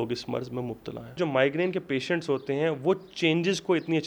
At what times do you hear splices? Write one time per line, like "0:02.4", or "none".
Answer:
0:01.2